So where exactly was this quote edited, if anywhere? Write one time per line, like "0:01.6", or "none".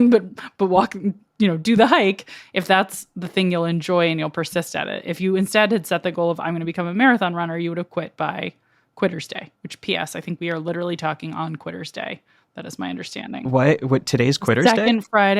0:05.5